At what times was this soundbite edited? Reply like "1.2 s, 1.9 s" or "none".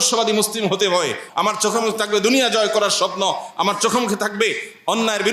1.2 s